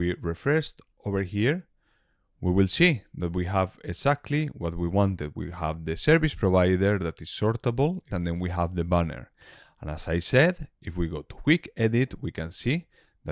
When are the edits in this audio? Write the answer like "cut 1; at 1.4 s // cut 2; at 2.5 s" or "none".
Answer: cut 1; at 8.1 s